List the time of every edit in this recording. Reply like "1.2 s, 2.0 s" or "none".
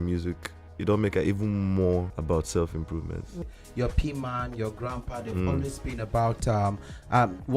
2.1 s, 3.4 s

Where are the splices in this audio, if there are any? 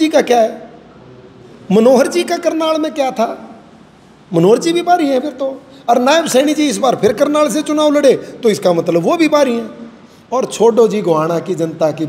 none

